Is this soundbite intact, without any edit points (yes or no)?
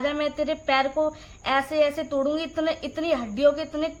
yes